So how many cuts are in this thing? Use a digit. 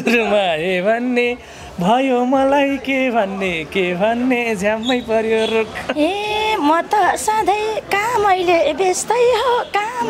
1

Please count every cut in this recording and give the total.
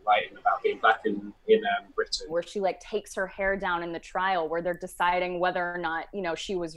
1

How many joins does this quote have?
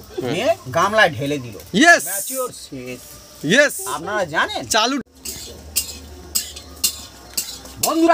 1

